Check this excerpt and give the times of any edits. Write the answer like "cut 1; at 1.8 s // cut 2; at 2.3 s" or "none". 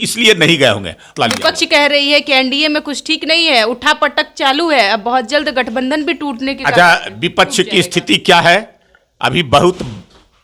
cut 1; at 1.1 s